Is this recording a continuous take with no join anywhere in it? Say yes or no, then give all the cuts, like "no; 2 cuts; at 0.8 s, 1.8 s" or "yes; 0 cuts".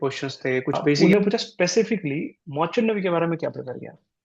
no; 1 cut; at 1.0 s